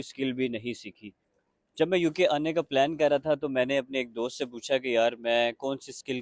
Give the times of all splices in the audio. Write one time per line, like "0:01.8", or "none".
0:01.5